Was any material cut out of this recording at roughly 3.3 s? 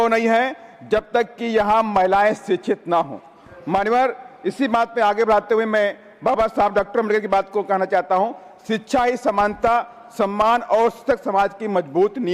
no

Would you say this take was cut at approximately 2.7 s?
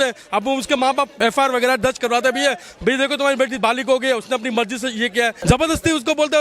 no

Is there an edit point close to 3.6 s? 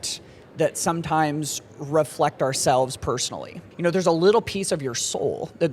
yes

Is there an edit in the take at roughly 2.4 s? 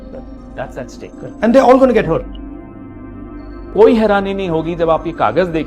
yes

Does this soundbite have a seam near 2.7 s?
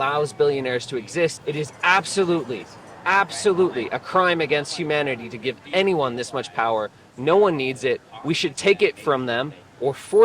no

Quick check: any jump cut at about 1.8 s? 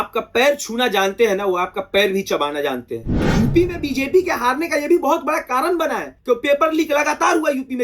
no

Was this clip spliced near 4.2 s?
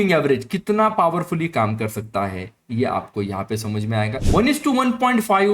yes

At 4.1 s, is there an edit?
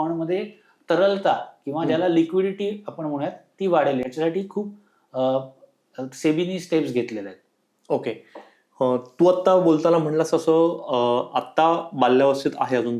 no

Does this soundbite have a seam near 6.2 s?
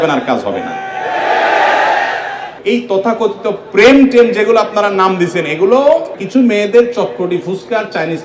yes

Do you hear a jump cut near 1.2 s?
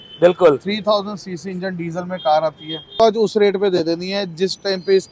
no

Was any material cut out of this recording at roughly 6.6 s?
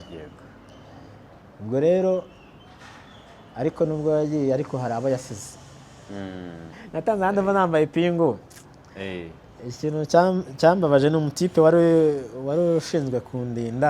yes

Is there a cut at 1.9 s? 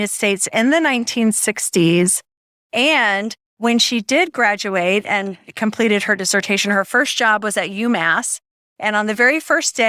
no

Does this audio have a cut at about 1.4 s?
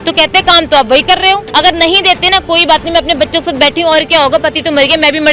yes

